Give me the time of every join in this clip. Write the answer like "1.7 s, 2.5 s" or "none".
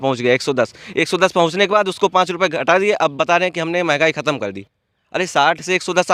none